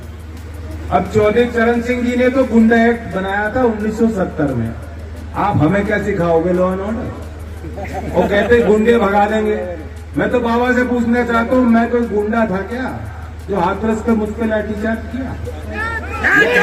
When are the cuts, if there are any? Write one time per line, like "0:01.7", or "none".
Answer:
none